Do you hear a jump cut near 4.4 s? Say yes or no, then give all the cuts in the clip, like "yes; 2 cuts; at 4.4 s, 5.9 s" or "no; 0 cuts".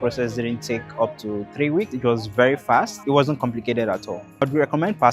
yes; 3 cuts; at 1.9 s, 3.0 s, 4.4 s